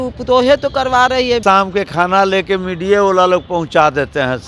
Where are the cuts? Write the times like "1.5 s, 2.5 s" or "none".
1.4 s